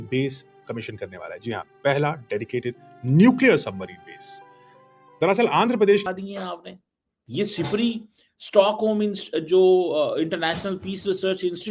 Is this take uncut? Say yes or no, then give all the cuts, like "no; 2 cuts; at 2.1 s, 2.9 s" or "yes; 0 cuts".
no; 1 cut; at 6.0 s